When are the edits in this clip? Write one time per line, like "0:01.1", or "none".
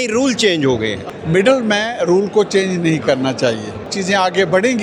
0:01.1
0:03.9